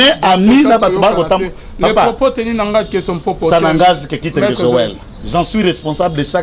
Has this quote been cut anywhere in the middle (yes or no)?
no